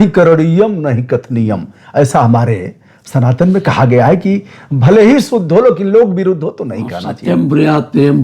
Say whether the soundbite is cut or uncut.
uncut